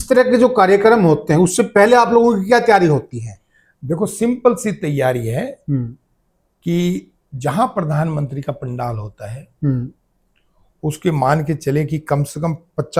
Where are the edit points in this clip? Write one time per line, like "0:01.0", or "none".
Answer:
none